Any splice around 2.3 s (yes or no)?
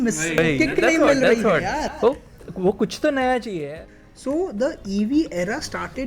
no